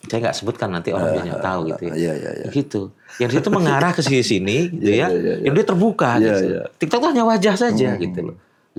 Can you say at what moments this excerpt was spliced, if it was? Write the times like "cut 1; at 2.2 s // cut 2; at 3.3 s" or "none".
none